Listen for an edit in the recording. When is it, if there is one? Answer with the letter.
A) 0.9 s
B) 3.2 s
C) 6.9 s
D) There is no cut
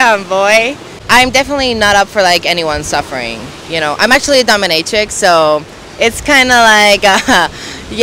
A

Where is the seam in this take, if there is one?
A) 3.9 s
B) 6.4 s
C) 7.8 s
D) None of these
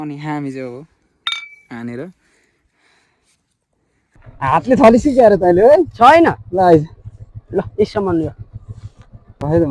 A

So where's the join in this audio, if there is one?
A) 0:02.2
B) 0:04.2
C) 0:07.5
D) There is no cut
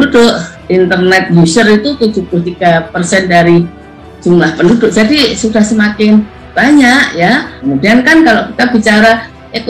C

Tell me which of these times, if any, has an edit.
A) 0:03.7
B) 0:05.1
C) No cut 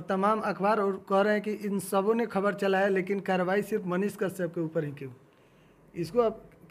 C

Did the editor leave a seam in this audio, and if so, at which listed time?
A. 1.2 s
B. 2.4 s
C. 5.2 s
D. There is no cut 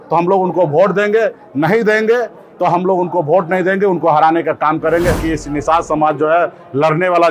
C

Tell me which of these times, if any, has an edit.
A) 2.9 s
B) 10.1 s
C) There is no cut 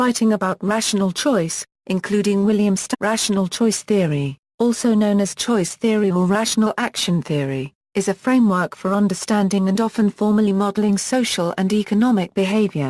C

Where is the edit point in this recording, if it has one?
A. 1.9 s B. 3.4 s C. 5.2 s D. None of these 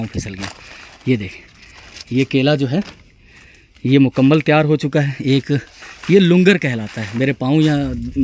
D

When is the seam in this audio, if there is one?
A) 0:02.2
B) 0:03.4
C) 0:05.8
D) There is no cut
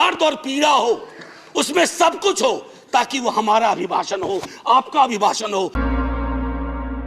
C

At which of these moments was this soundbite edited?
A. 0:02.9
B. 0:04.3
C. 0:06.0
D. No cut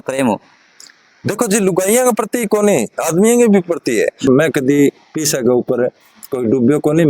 B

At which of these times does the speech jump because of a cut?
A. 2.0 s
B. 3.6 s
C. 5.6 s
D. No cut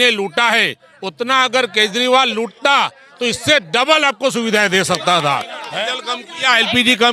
C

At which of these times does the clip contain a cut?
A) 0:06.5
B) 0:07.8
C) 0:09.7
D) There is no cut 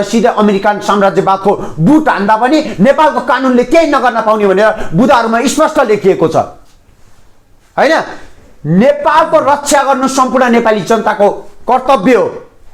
D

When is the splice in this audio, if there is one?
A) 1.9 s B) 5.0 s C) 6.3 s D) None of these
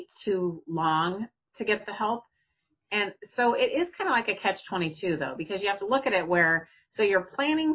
D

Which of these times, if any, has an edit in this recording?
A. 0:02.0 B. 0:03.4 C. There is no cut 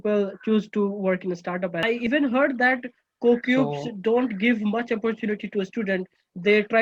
A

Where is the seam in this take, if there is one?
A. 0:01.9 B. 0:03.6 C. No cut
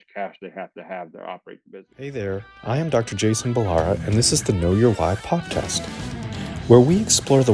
A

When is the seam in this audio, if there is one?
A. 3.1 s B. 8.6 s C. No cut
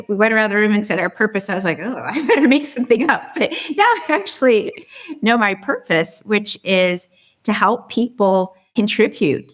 B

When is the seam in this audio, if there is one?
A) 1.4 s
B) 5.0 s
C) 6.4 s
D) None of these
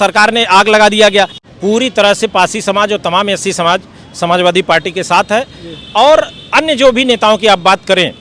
A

